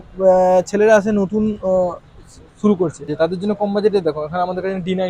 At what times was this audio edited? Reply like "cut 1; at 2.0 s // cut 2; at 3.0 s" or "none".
cut 1; at 3.1 s

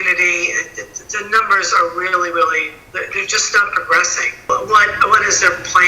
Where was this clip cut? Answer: cut 1; at 4.4 s

